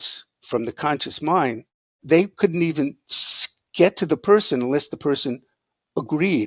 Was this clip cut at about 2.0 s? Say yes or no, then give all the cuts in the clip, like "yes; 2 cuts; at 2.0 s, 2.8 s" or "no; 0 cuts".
yes; 1 cut; at 2.0 s